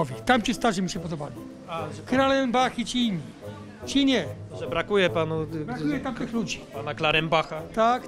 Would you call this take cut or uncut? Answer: uncut